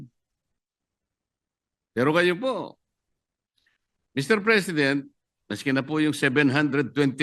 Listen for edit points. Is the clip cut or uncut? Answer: uncut